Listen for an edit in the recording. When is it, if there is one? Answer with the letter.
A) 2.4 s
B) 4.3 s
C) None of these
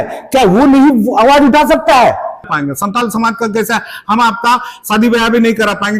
A